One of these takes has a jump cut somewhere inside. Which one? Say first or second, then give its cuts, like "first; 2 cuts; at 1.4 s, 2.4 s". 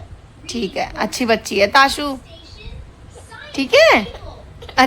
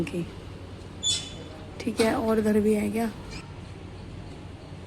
second; 1 cut; at 3.5 s